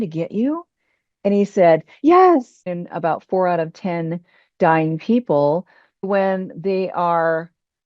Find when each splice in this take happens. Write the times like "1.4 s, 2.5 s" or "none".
2.7 s, 6.1 s

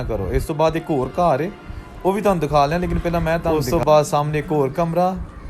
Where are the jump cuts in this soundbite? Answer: 3.5 s

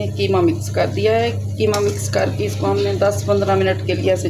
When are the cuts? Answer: none

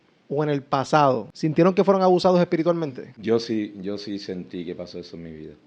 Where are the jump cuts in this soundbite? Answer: 1.3 s, 3.1 s

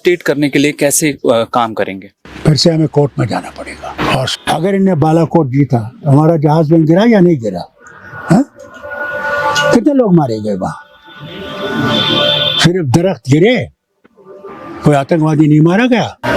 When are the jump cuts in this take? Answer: 4.4 s

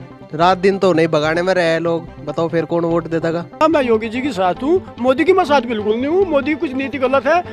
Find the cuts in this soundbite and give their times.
3.6 s

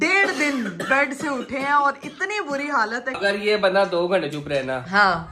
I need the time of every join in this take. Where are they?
3.2 s

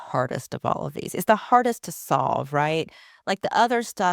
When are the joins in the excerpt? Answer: none

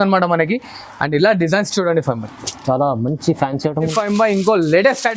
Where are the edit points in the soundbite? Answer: 3.9 s

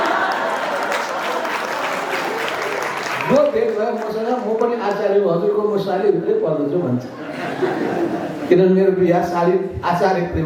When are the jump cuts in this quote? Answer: none

